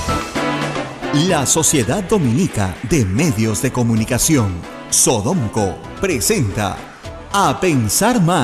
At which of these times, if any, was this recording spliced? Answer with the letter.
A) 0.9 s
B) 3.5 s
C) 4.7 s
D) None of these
A